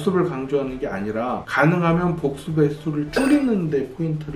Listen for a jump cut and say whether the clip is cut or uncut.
cut